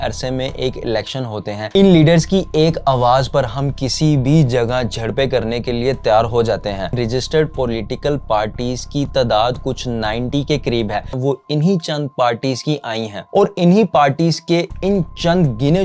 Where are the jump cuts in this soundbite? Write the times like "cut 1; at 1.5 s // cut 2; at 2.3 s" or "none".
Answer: cut 1; at 1.6 s // cut 2; at 6.9 s // cut 3; at 11.1 s